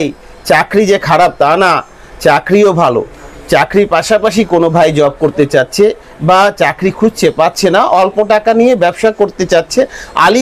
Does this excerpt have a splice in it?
no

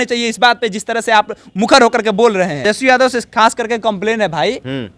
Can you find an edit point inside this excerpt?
yes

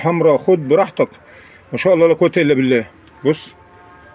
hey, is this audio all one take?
yes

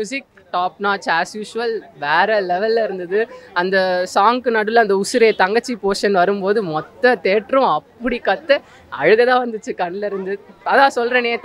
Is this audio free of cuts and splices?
yes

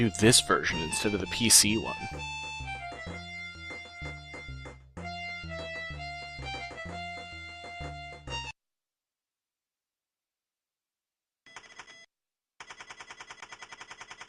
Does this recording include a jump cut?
no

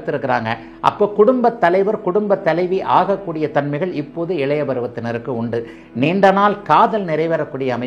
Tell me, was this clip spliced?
no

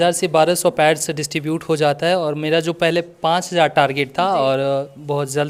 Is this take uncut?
yes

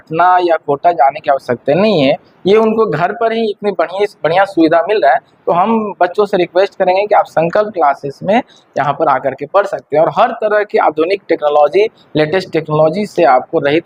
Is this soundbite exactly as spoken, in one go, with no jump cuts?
yes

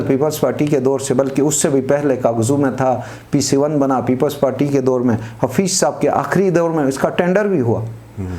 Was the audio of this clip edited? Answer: no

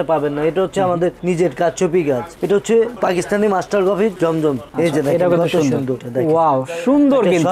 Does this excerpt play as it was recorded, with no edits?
no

